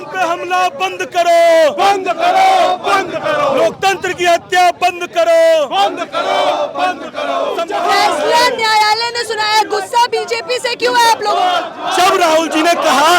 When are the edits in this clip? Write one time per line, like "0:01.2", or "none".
0:07.7
0:11.8